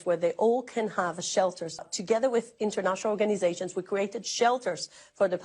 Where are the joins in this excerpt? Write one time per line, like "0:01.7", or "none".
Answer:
0:01.8